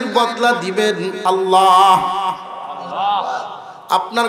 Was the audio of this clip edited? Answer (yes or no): no